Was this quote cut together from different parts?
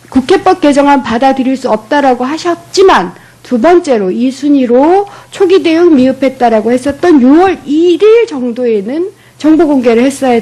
yes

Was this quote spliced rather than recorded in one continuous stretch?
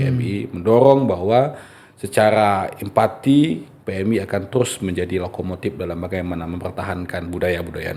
no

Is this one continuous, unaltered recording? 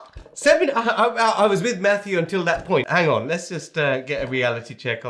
no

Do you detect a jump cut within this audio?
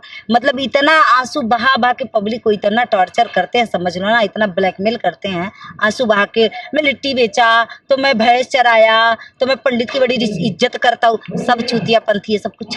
no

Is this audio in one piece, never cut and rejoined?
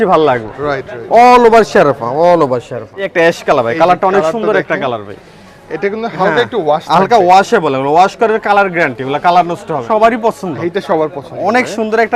no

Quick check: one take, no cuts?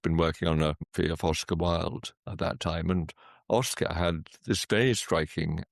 no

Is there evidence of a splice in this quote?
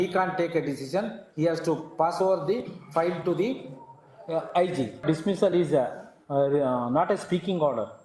yes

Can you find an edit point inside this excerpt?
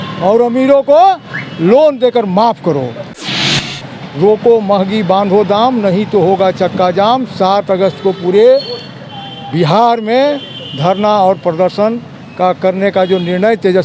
yes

